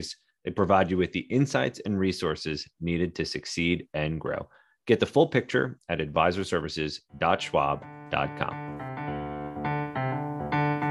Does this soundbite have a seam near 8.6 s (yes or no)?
yes